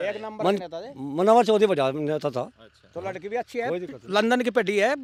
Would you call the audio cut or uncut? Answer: uncut